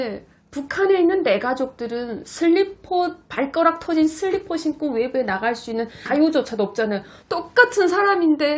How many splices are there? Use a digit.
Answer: 2